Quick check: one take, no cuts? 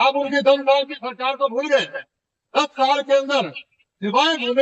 yes; 0 cuts

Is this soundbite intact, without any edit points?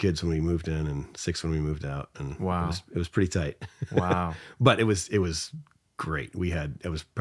yes; 0 cuts

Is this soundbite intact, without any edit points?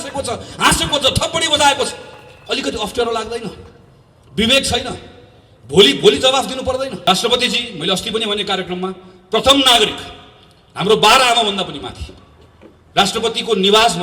no; 1 cut; at 7.0 s

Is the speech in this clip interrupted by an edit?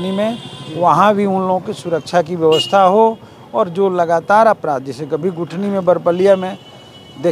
no; 0 cuts

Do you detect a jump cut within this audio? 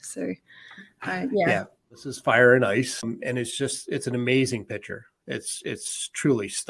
yes; 2 cuts; at 2.1 s, 3.0 s

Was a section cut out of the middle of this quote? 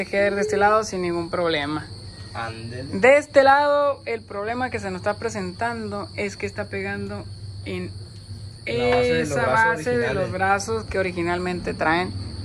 no; 0 cuts

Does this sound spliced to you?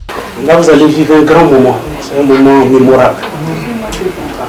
no; 0 cuts

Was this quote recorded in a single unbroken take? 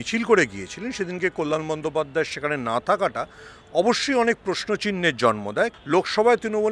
no; 1 cut; at 5.7 s

